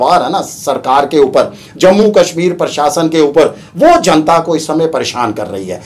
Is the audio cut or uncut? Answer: uncut